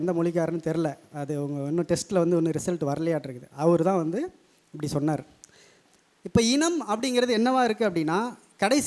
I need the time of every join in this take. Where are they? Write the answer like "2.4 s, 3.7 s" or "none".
5.8 s